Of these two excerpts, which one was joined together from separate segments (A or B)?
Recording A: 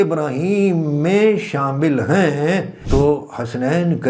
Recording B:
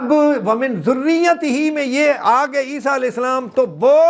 A